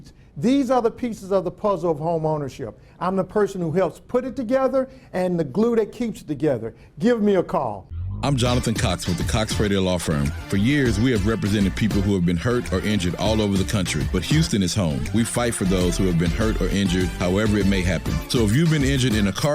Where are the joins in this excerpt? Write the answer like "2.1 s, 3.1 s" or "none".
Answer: 8.0 s